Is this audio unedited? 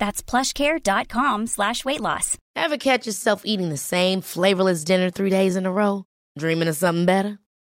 no; 1 cut; at 2.3 s

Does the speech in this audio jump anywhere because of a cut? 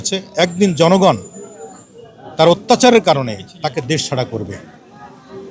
no; 0 cuts

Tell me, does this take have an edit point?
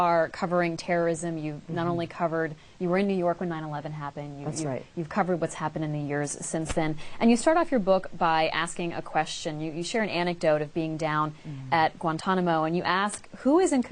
no; 0 cuts

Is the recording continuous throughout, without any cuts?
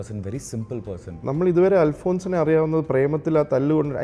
no; 1 cut; at 1.2 s

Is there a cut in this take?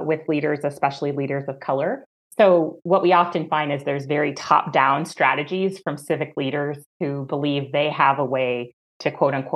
yes; 1 cut; at 2.2 s

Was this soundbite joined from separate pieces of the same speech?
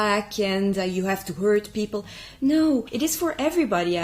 yes; 1 cut; at 2.9 s

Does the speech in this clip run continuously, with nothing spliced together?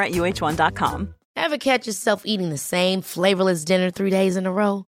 no; 1 cut; at 1.2 s

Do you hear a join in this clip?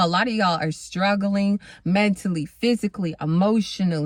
no; 0 cuts

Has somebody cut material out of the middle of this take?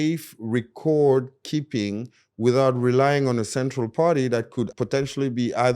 yes; 1 cut; at 4.7 s

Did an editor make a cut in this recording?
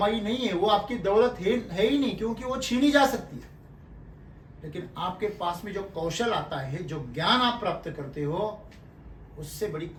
no; 0 cuts

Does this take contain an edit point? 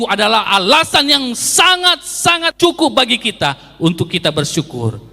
yes; 1 cut; at 2.5 s

